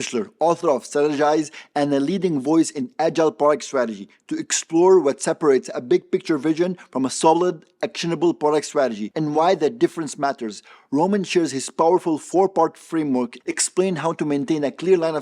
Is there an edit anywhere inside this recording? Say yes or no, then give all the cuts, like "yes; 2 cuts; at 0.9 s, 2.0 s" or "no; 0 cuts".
no; 0 cuts